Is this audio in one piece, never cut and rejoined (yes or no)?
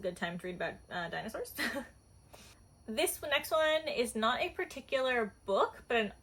yes